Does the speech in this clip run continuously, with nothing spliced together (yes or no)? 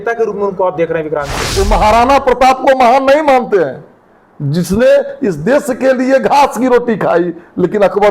no